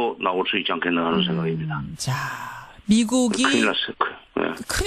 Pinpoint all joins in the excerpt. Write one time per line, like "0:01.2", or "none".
none